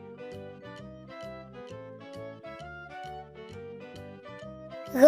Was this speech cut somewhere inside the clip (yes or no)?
no